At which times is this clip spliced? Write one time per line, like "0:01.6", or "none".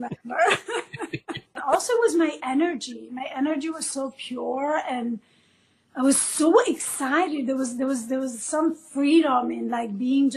0:01.6